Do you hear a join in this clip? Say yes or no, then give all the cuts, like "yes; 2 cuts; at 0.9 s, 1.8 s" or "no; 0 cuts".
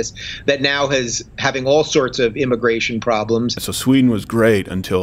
yes; 1 cut; at 3.7 s